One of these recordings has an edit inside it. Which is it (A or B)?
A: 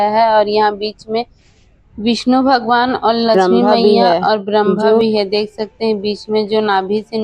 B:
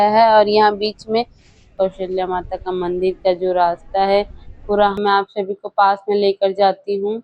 B